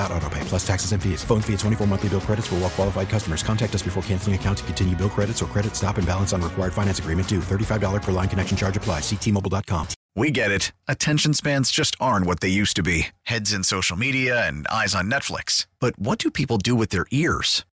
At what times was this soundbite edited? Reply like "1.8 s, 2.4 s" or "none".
10.0 s